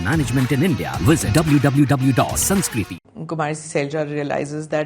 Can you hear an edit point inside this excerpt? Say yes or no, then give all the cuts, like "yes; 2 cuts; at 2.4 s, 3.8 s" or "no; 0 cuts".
yes; 1 cut; at 3.0 s